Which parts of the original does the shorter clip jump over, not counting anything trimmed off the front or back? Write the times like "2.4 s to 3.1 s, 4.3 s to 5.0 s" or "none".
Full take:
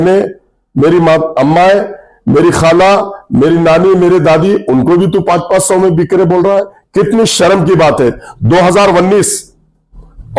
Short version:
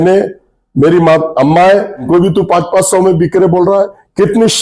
2.1 s to 4.8 s